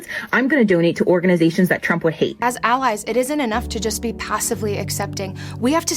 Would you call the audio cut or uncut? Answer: cut